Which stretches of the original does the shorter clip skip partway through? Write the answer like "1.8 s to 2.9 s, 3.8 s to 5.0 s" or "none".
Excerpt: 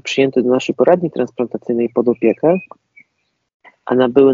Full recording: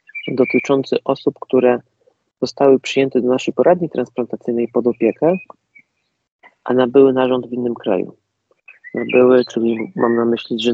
none